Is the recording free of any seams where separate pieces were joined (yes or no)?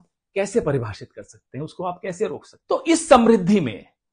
no